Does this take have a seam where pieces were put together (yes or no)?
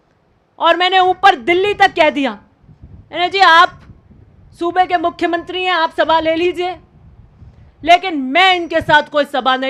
no